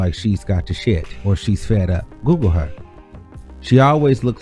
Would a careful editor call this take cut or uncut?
uncut